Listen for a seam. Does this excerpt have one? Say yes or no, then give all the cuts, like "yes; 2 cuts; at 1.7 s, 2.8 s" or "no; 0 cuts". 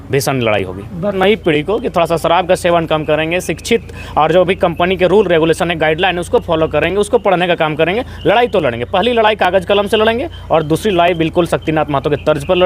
yes; 1 cut; at 1.2 s